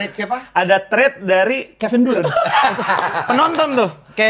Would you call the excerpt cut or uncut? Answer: uncut